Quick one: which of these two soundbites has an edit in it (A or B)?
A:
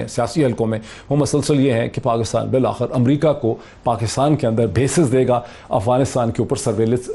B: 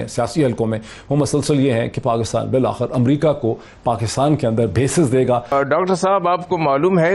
B